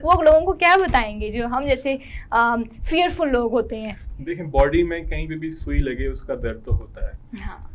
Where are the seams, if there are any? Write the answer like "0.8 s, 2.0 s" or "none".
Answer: none